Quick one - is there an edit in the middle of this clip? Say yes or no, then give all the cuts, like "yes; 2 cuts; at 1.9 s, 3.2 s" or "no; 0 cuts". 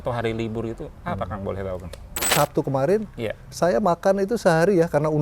yes; 1 cut; at 2.3 s